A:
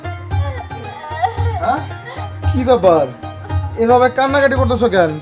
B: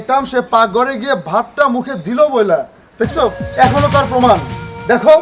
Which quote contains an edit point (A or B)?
A